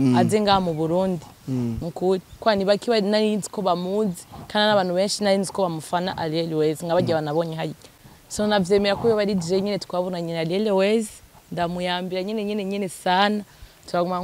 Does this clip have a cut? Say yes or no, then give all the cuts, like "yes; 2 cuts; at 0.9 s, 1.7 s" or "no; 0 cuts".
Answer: yes; 1 cut; at 8.0 s